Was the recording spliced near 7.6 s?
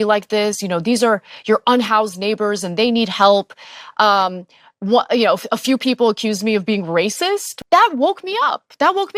yes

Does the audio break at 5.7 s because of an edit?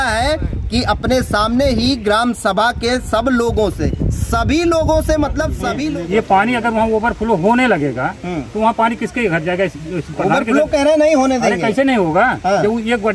yes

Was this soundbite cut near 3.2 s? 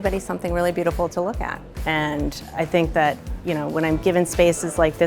no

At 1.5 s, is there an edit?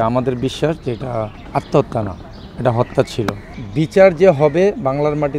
no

